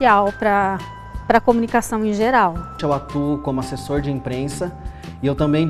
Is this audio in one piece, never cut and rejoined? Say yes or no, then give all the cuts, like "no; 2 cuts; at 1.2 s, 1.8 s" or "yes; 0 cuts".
no; 1 cut; at 2.8 s